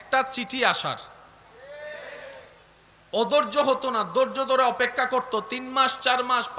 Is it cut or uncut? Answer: uncut